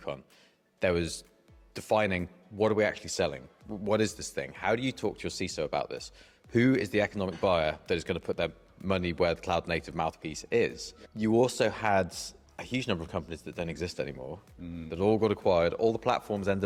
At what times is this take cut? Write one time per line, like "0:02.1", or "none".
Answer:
none

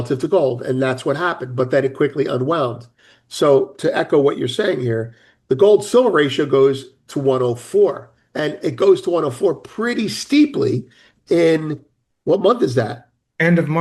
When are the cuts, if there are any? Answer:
none

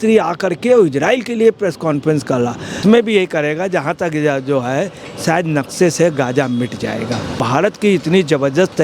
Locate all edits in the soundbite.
0:02.8
0:07.4

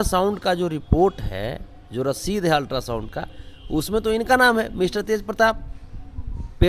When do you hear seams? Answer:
none

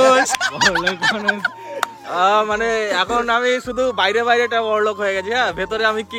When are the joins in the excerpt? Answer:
none

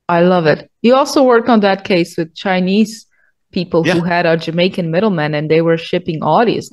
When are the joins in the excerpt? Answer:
none

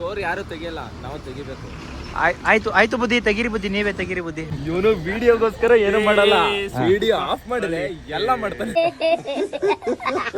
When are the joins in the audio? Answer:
0:04.5
0:08.7

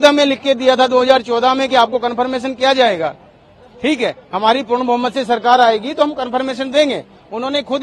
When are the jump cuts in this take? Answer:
none

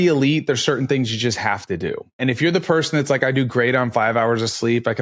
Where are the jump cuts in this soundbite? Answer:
0:02.2

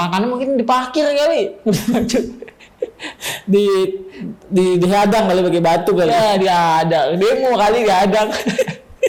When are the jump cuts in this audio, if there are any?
none

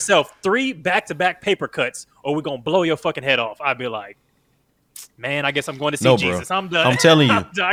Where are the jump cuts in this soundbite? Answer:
none

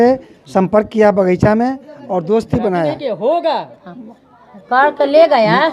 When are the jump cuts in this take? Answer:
none

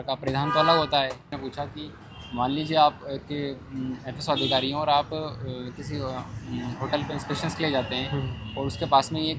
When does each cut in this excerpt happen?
0:01.4

